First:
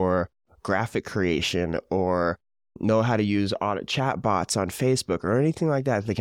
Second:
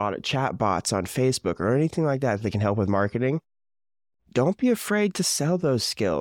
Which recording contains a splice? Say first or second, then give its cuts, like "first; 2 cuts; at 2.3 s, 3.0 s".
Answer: first; 1 cut; at 2.7 s